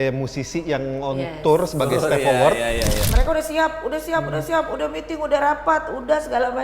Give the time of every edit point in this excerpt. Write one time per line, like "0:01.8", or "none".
0:03.1